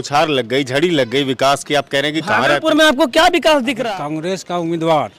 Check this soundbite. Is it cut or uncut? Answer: cut